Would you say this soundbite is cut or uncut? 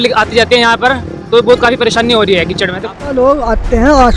cut